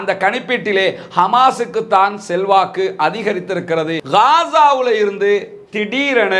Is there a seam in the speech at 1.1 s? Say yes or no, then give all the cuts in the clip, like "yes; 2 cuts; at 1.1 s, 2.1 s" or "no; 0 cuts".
no; 1 cut; at 4.0 s